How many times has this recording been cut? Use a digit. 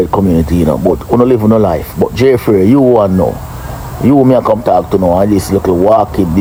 0